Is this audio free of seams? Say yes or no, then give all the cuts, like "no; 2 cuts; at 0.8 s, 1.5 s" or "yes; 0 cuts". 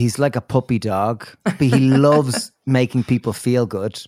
no; 1 cut; at 1.6 s